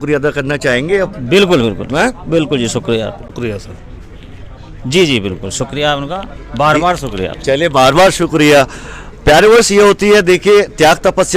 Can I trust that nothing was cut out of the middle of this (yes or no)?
no